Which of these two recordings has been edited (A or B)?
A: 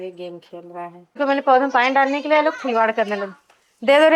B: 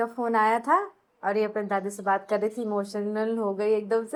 A